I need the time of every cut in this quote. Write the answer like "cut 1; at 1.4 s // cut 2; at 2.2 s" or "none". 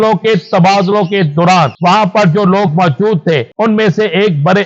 cut 1; at 1.7 s // cut 2; at 3.5 s